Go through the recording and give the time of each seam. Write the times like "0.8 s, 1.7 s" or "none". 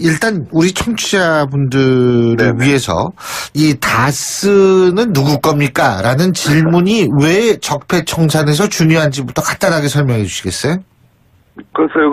8.5 s